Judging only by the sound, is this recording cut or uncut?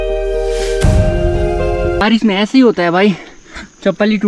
cut